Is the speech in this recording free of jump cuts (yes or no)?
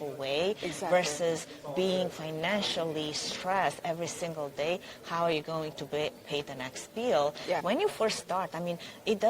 no